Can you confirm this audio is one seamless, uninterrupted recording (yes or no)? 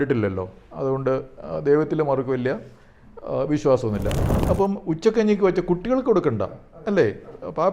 no